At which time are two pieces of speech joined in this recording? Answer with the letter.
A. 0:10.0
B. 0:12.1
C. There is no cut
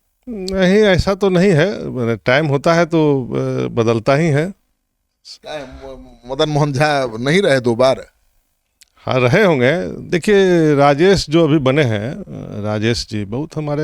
A